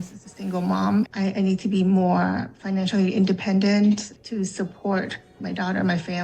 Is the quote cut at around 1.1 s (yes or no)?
yes